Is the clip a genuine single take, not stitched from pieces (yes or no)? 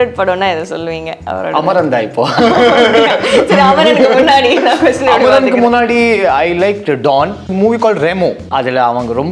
no